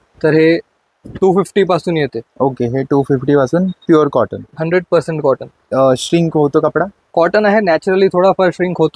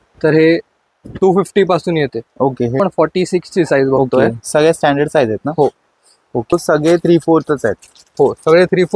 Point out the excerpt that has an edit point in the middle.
second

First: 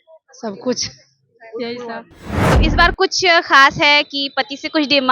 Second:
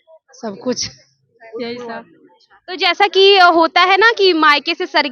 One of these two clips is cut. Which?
first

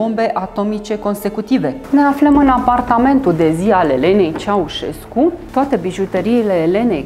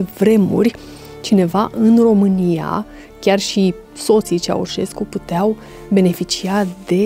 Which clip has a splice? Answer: first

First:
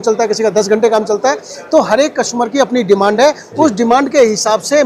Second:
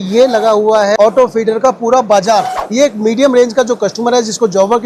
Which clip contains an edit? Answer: second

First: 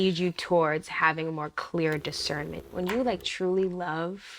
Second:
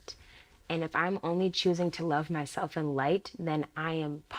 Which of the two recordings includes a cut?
first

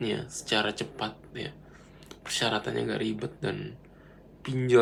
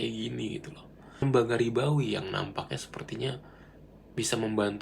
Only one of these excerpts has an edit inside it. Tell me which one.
second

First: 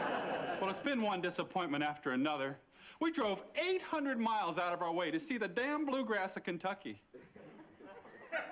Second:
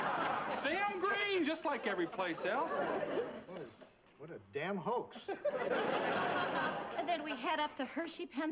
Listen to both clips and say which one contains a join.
second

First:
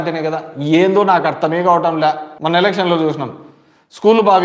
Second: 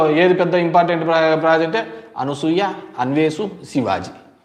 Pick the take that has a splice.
first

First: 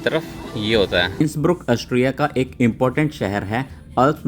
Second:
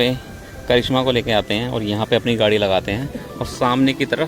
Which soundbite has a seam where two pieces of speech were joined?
first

